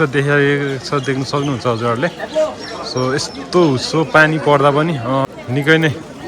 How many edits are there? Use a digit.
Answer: 1